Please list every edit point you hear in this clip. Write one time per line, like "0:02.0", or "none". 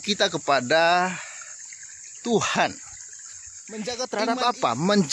0:03.8